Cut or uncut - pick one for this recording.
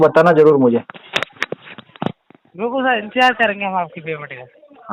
uncut